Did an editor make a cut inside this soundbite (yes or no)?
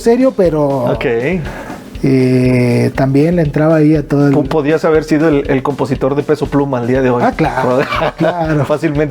no